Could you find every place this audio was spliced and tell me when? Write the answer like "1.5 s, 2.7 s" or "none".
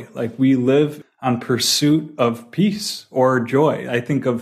1.0 s